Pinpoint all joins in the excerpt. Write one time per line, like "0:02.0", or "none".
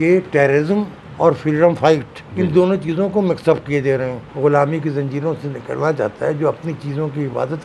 0:01.0
0:02.2
0:04.2

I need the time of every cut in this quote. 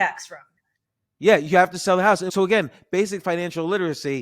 0:02.3

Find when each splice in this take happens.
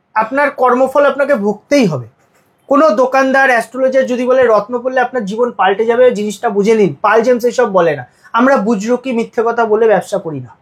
none

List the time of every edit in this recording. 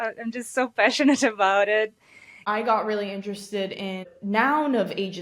0:02.4
0:04.1

